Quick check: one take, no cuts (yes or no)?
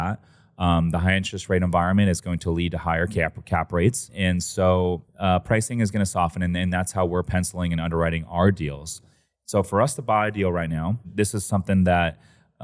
no